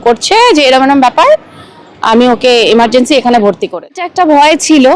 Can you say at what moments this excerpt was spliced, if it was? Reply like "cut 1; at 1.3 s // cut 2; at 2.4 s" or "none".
cut 1; at 4.0 s